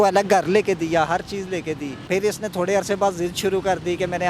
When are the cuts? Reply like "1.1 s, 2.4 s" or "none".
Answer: 1.9 s